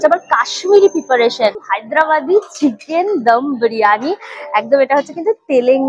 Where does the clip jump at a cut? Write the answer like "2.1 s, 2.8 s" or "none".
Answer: 1.7 s